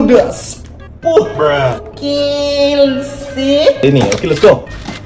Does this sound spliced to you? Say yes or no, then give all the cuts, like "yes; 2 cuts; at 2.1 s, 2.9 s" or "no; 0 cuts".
yes; 1 cut; at 3.8 s